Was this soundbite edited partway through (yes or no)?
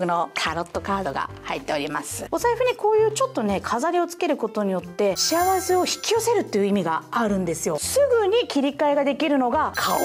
yes